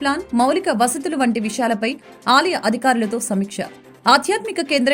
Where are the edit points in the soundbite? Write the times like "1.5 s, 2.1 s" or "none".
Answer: none